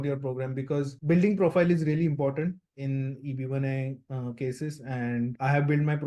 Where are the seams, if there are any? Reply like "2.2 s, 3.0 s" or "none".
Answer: none